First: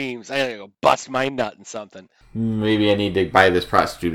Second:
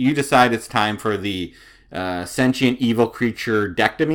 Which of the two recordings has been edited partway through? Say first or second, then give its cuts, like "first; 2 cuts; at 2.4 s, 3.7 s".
first; 1 cut; at 1.8 s